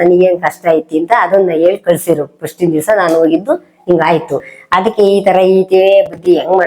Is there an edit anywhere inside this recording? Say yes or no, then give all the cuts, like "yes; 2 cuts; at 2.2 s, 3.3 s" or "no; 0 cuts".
no; 0 cuts